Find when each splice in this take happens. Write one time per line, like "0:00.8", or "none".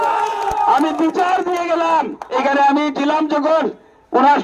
0:02.2